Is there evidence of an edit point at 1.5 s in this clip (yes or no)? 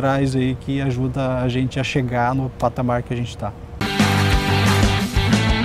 no